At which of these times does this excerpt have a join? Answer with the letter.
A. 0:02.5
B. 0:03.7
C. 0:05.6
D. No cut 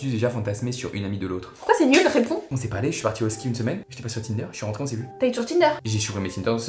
A